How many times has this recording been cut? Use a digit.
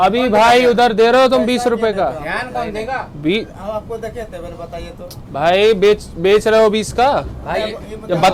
0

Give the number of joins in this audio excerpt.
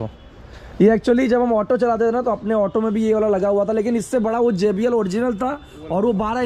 0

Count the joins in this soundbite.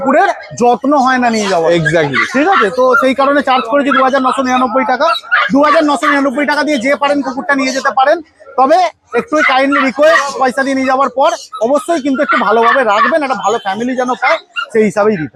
0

